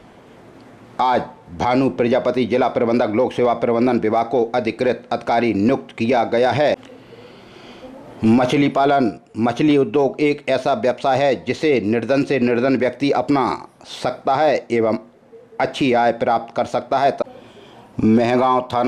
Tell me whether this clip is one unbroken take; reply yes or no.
no